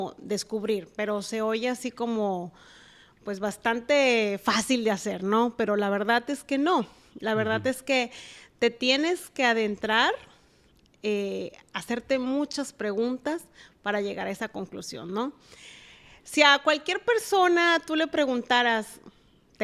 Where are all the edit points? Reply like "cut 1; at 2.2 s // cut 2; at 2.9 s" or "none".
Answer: none